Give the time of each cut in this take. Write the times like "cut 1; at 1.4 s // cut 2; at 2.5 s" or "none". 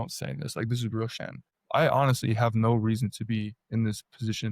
cut 1; at 1.2 s